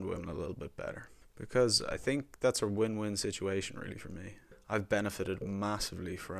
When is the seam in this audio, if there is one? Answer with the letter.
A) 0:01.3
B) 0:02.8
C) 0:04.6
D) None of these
D